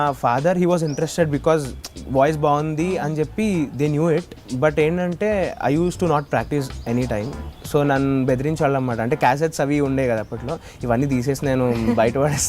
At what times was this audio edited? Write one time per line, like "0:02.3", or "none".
0:04.4